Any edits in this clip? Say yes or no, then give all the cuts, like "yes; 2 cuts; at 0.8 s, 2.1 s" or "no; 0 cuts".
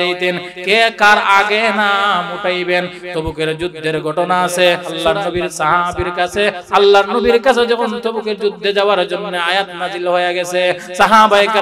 yes; 1 cut; at 4.9 s